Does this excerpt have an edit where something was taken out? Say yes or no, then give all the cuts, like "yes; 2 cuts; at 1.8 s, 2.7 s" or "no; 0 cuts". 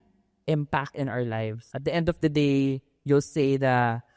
yes; 1 cut; at 1.6 s